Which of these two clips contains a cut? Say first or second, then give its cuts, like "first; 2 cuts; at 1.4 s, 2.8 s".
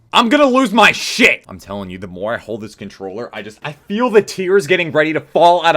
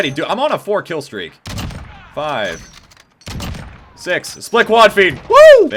first; 1 cut; at 1.5 s